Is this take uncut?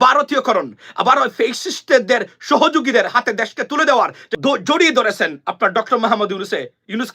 no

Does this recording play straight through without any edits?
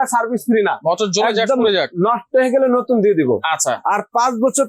yes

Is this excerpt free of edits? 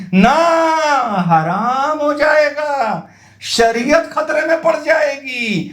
yes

